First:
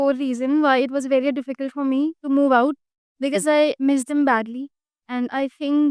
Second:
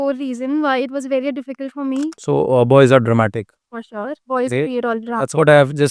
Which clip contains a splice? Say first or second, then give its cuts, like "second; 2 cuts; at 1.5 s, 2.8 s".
second; 1 cut; at 2.2 s